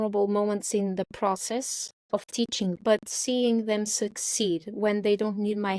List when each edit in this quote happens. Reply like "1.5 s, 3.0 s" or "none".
2.8 s